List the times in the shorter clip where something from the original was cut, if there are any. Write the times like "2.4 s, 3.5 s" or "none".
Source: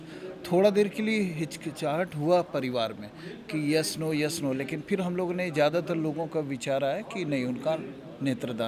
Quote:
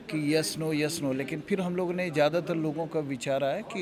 none